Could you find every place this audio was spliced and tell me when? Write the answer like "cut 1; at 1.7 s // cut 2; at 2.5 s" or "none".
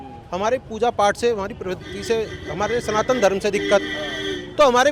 none